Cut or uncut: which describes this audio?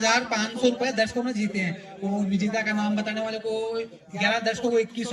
uncut